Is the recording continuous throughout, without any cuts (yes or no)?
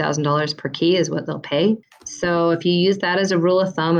no